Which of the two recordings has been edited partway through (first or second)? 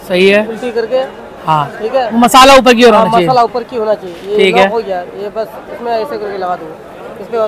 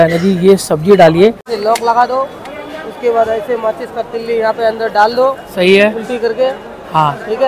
second